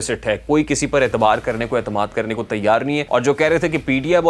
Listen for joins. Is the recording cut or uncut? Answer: cut